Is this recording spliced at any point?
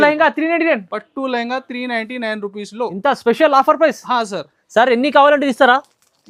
no; 0 cuts

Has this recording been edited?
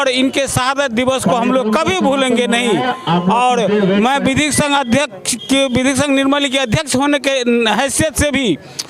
no; 0 cuts

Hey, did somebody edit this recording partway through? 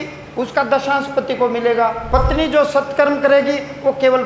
yes; 1 cut; at 2.0 s

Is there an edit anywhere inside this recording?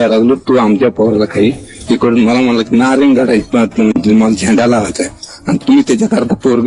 no; 0 cuts

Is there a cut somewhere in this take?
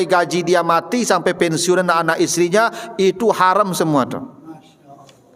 no; 0 cuts

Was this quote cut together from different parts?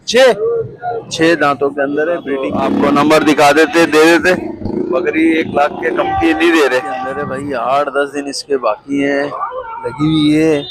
yes; 2 cuts; at 2.3 s, 7.3 s

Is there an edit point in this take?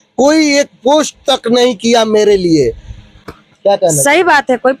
no; 0 cuts

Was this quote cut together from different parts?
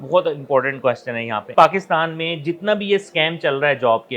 yes; 1 cut; at 1.5 s

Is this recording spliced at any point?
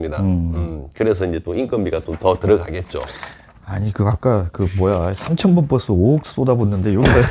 no; 0 cuts

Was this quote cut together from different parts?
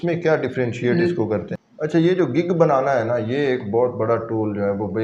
yes; 1 cut; at 1.5 s

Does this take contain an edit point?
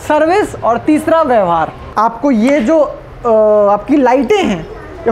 yes; 1 cut; at 1.8 s

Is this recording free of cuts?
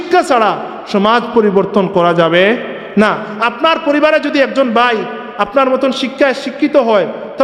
yes; 0 cuts

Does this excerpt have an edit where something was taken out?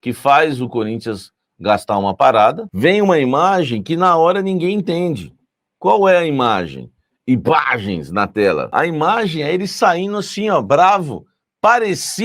yes; 2 cuts; at 2.7 s, 8.7 s

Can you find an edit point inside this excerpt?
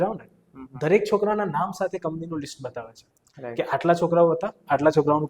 no; 0 cuts

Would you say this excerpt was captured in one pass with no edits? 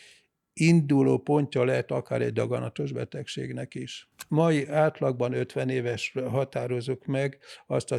no; 1 cut; at 4.1 s

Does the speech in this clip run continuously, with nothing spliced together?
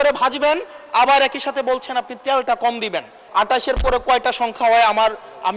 no; 1 cut; at 3.1 s

